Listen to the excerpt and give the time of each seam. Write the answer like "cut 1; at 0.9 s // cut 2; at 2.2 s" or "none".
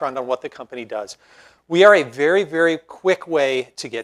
none